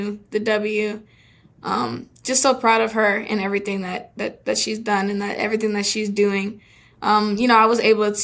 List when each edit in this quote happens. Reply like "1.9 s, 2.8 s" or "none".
none